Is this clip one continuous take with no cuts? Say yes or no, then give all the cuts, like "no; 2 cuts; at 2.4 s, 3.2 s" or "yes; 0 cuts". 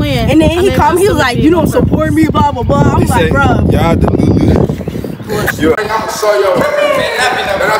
no; 1 cut; at 5.8 s